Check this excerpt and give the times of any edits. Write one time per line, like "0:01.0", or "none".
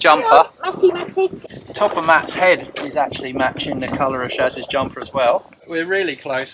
0:01.4
0:05.6